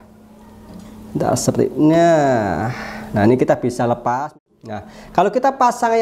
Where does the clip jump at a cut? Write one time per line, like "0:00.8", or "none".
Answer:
0:04.4

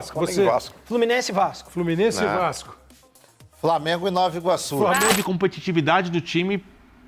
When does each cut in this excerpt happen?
0:05.1

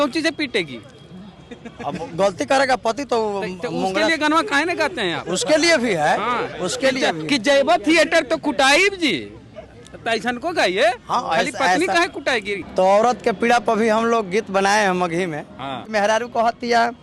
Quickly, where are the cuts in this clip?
0:12.6
0:15.9

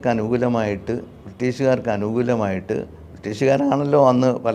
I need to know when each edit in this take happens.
none

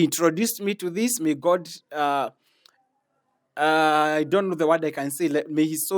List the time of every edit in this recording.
none

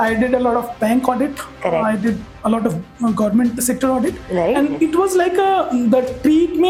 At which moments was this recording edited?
none

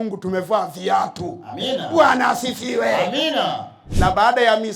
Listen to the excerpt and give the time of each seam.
0:03.8

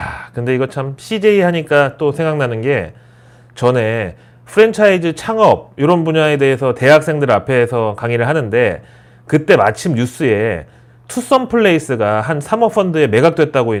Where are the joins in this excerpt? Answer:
none

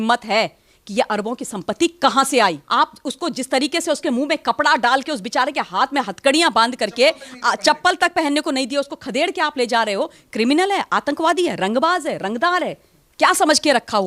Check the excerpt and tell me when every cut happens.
0:02.6

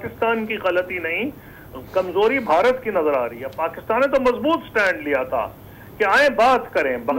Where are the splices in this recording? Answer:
none

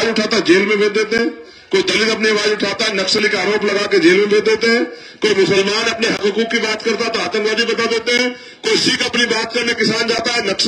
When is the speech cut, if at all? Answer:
none

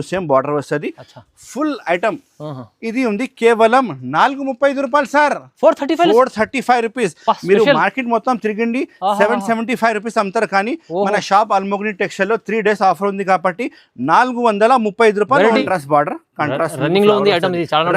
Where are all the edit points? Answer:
0:15.6

